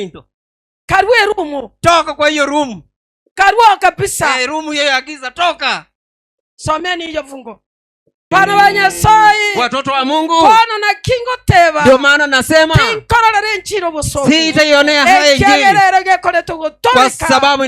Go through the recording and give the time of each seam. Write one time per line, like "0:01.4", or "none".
0:08.3